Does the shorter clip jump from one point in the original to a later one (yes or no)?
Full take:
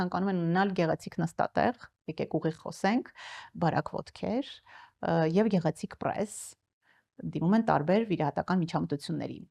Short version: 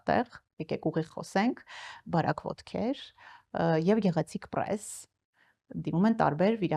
no